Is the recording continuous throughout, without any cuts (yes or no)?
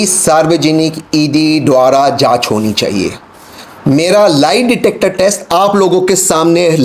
yes